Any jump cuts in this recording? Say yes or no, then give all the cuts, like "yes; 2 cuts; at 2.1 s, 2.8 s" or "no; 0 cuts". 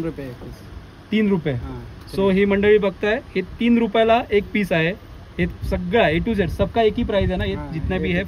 no; 0 cuts